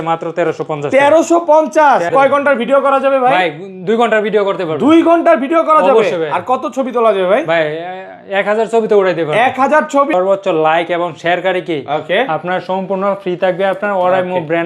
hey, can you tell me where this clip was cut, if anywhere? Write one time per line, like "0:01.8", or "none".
0:02.1
0:10.1